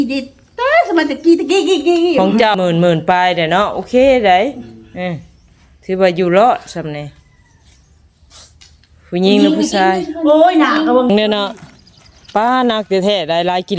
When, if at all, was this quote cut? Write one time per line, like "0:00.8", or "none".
0:02.5
0:11.1